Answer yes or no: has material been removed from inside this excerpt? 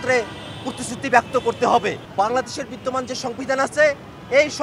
yes